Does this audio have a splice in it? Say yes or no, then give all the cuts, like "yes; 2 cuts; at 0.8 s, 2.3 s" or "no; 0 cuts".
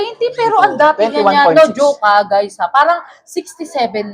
no; 0 cuts